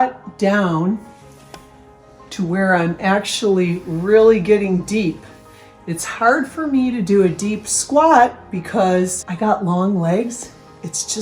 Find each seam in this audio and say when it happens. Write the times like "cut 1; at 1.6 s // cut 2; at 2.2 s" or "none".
cut 1; at 9.2 s